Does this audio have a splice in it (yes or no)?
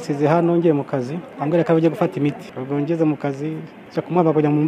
yes